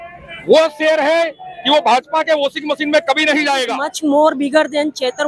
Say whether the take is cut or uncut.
cut